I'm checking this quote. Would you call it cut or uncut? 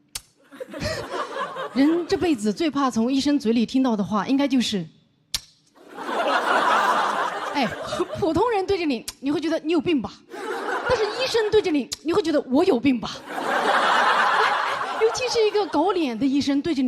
uncut